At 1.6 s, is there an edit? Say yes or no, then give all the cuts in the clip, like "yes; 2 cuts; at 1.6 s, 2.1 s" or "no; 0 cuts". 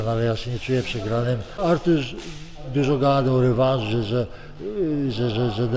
yes; 1 cut; at 1.6 s